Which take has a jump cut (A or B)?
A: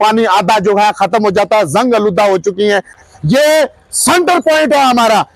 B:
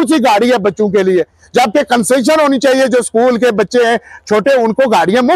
A